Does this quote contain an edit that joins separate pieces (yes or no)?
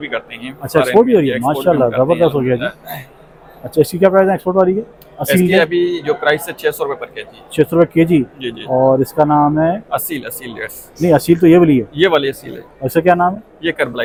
no